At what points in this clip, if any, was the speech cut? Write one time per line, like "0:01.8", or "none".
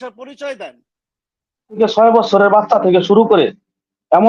0:01.8